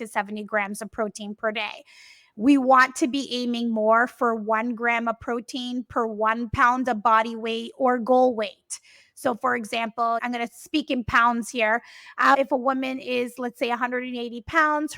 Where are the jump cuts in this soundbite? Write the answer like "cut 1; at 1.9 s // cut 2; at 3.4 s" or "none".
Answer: cut 1; at 12.3 s